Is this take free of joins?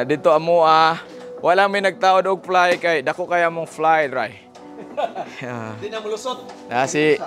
yes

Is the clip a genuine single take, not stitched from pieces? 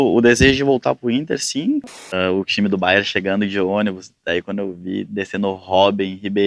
no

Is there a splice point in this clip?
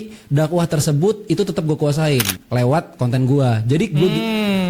yes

